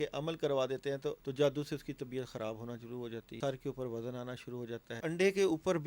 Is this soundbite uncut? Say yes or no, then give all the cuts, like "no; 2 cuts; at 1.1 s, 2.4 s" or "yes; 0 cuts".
no; 3 cuts; at 1.2 s, 3.3 s, 5.0 s